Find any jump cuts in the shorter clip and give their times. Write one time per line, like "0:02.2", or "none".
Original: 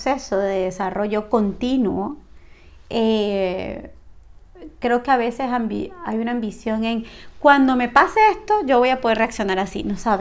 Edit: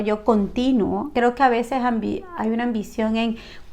0:01.1